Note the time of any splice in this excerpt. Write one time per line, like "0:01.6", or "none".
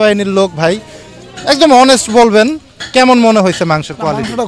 none